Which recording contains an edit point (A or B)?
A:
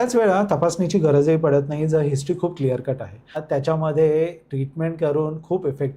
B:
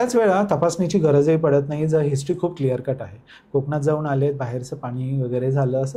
A